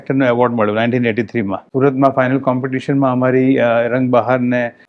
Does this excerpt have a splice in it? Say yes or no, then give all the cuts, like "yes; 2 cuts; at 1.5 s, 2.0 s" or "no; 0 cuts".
yes; 1 cut; at 1.7 s